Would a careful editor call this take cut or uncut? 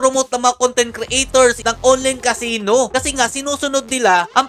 cut